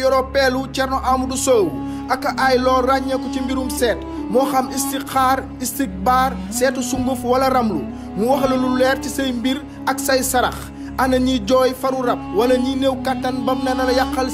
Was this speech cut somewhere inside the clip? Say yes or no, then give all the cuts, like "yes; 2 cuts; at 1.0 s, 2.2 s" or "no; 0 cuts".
no; 0 cuts